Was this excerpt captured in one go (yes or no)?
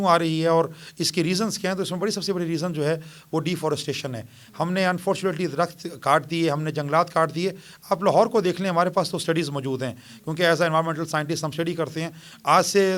yes